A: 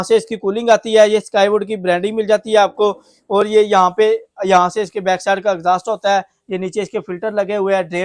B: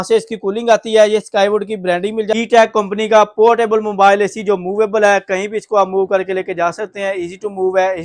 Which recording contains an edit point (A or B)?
B